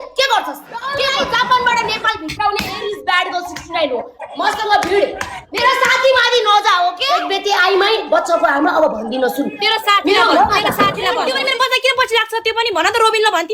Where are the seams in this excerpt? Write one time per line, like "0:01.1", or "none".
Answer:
0:00.9
0:07.1
0:11.2